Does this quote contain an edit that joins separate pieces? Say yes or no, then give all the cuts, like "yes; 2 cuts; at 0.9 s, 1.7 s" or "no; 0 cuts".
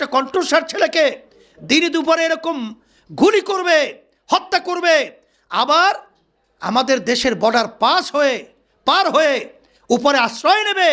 no; 0 cuts